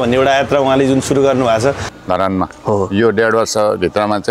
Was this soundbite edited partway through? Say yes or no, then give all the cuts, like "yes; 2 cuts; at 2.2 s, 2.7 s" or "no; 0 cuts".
yes; 1 cut; at 1.9 s